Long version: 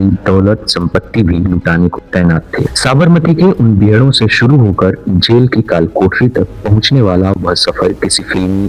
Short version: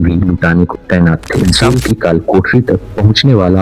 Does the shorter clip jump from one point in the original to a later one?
yes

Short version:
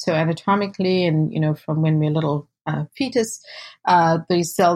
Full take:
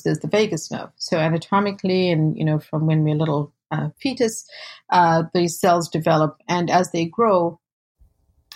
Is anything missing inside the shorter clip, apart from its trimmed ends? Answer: no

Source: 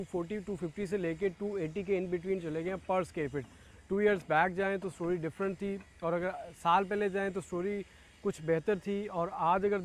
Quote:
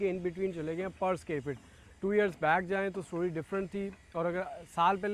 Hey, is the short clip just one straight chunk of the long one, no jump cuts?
yes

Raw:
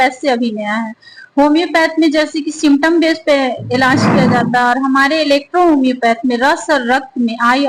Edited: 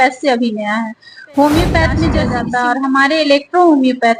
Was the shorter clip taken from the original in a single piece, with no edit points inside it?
no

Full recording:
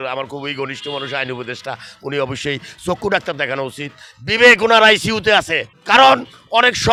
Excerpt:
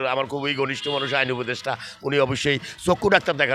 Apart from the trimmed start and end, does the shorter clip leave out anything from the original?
no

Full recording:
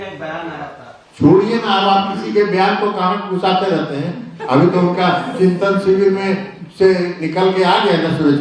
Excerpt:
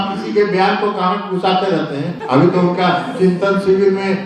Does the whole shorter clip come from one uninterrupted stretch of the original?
no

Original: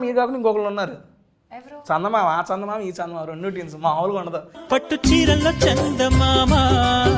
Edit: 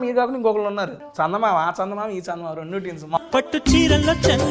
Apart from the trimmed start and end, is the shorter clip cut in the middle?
yes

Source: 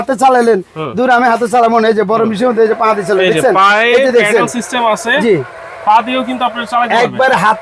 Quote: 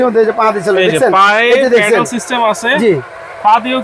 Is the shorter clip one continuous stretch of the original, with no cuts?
yes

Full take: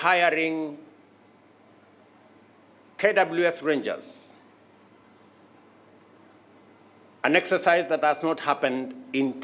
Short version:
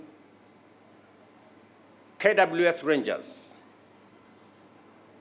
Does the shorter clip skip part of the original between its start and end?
no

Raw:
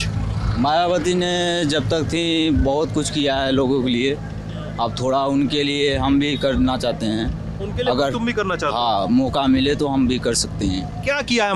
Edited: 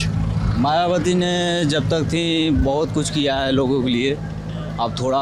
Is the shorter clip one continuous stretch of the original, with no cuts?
yes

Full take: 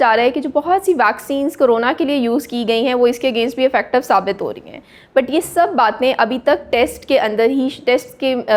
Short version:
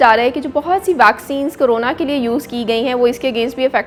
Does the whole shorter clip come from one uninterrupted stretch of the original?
yes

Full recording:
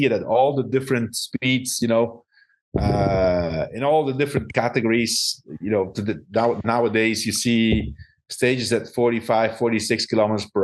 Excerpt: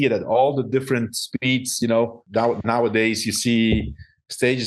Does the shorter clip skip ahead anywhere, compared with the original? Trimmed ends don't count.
yes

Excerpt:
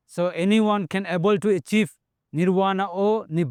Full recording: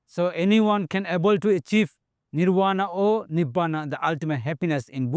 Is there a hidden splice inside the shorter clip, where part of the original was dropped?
no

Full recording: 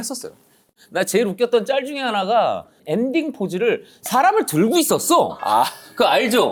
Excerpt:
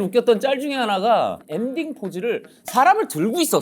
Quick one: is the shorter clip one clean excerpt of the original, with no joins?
no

